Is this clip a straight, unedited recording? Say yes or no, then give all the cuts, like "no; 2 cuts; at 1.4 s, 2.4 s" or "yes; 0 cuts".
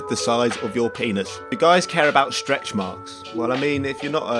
no; 1 cut; at 1.5 s